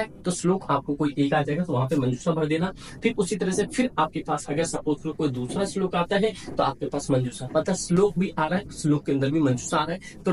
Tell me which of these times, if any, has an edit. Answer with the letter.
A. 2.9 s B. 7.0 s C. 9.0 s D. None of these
D